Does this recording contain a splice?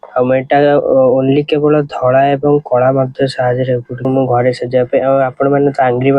yes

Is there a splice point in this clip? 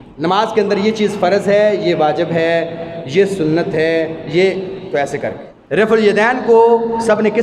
yes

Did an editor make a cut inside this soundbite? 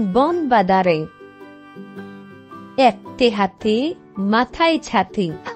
yes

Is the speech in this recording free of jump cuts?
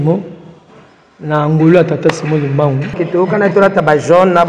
no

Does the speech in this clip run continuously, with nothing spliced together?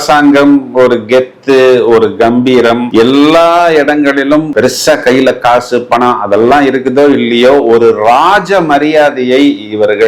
yes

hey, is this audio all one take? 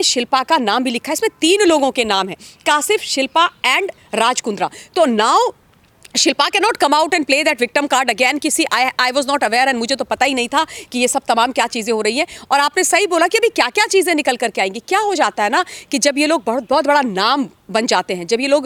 yes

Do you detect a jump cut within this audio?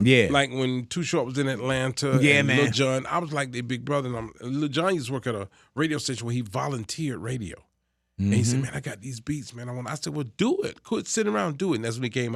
no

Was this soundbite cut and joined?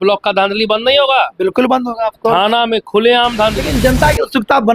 yes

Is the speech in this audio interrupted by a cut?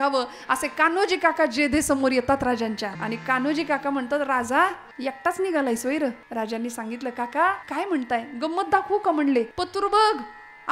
yes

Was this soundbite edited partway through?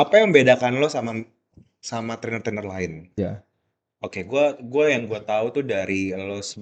yes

